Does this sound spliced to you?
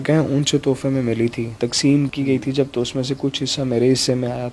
no; 0 cuts

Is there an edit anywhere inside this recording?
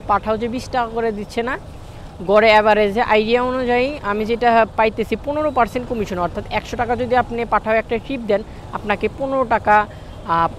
no; 0 cuts

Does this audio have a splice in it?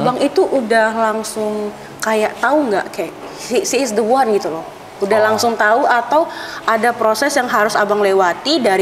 no; 0 cuts

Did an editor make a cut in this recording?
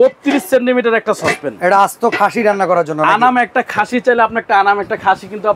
no; 0 cuts

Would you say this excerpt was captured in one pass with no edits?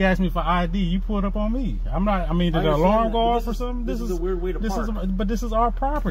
yes; 0 cuts

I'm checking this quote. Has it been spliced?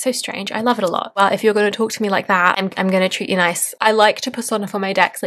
yes; 2 cuts; at 1.1 s, 3.8 s

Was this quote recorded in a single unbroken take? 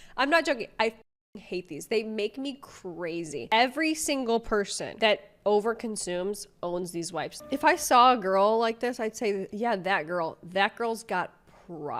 no; 3 cuts; at 3.4 s, 7.4 s, 9.5 s

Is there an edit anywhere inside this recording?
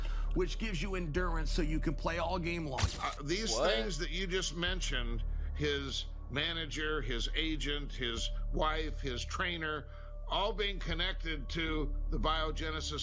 no; 0 cuts

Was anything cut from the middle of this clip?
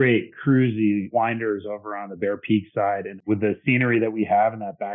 yes; 2 cuts; at 1.1 s, 3.3 s

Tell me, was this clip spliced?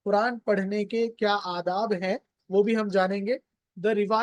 no; 0 cuts

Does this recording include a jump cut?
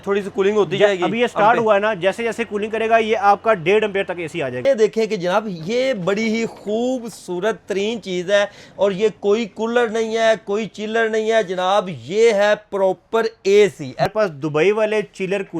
yes; 2 cuts; at 4.6 s, 14.0 s

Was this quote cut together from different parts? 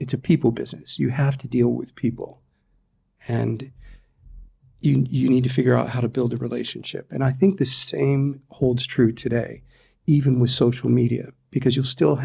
no; 0 cuts

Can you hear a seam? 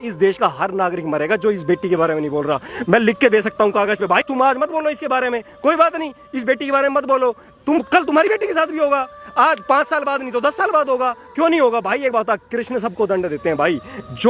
no; 0 cuts

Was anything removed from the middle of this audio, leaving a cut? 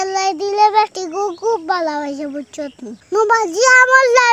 no; 0 cuts

